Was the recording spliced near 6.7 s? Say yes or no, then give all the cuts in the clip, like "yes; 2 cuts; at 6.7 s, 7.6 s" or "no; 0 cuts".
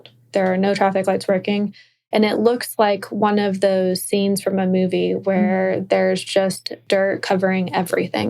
yes; 1 cut; at 6.7 s